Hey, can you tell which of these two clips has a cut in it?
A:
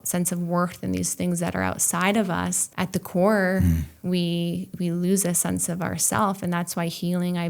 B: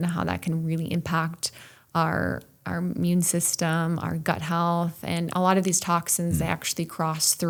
A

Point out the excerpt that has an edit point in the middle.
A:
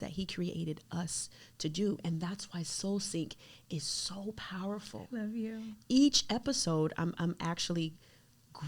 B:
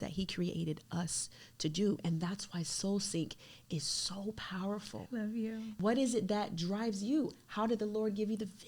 B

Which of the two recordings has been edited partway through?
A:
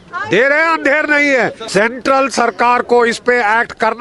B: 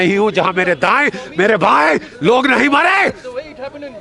A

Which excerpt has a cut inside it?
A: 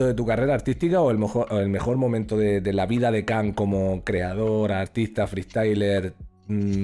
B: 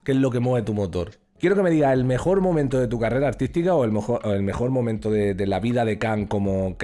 B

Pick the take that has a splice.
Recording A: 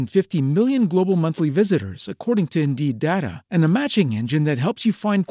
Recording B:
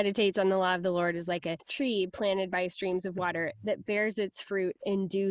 B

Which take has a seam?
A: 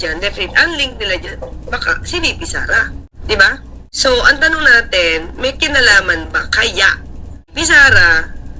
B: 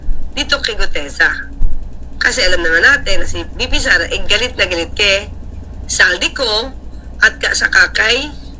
A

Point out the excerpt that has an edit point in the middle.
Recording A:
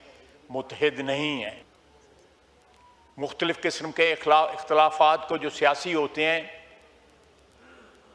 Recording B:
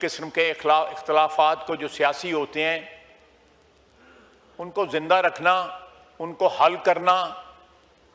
A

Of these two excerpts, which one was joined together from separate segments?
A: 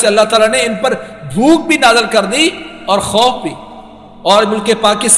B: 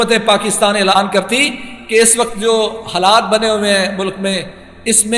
B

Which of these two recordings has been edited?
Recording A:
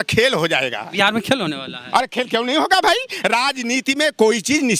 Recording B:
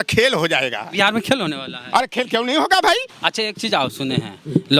B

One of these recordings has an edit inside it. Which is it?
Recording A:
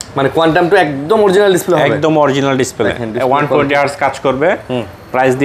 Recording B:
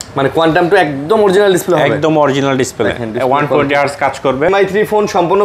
B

